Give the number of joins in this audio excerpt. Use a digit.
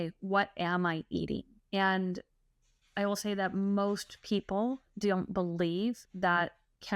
1